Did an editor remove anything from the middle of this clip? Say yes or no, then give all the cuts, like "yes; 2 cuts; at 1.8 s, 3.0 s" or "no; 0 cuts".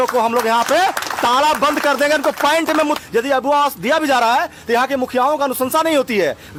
no; 0 cuts